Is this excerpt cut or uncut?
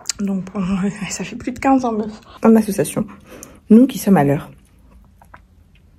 cut